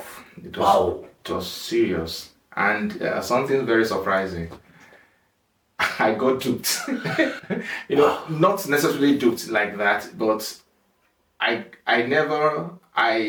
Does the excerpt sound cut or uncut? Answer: uncut